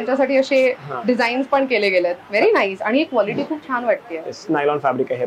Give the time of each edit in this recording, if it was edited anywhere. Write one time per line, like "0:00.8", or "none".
none

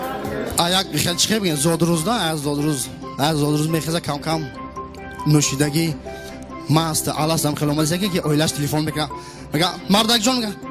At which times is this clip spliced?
none

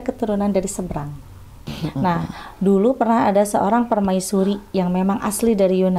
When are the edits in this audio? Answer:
0:01.6

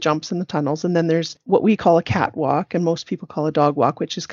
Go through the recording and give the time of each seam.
0:01.3

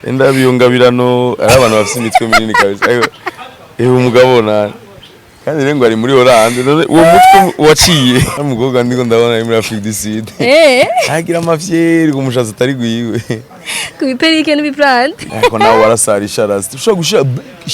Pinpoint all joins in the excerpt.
0:08.4
0:15.2

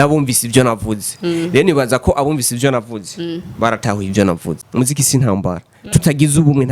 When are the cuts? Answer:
0:04.5

